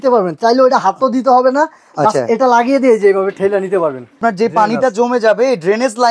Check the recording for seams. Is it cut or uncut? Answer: cut